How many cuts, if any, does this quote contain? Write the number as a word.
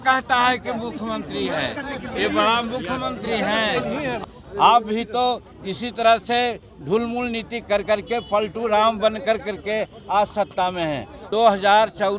two